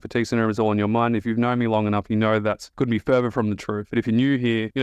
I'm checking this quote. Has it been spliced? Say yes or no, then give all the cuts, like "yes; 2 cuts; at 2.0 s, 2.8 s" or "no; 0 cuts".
yes; 2 cuts; at 2.6 s, 3.8 s